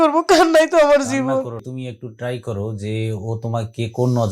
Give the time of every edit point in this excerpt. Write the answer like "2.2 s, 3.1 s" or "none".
1.6 s